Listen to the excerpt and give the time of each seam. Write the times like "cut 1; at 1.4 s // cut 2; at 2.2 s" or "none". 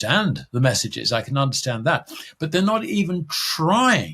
none